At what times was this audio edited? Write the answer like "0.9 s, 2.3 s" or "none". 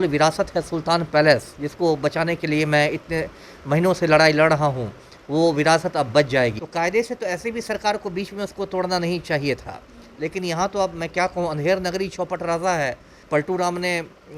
6.6 s, 13.2 s

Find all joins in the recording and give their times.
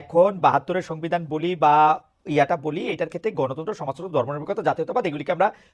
none

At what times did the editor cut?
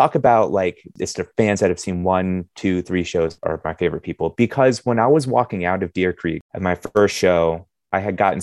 0.9 s, 3.4 s, 6.5 s

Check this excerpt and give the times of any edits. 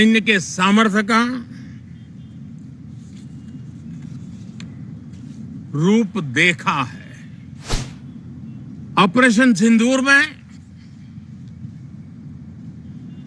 7.9 s

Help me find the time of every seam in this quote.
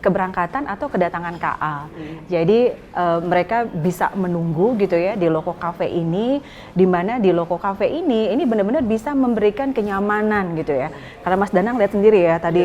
none

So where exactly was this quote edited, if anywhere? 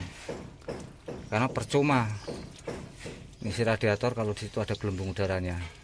none

